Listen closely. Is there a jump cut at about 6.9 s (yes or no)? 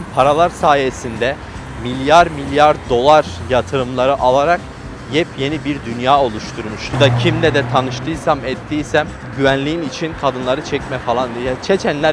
yes